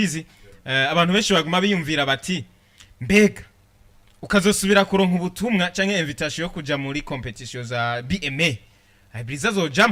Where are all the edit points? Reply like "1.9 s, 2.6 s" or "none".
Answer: none